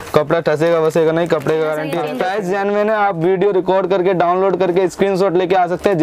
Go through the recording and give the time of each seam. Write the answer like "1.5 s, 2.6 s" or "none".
2.0 s